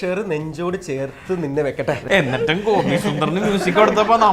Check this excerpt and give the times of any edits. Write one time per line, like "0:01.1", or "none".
0:02.0